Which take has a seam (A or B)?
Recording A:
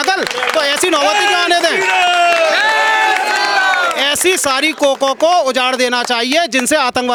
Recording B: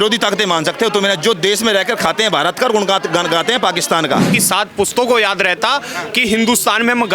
B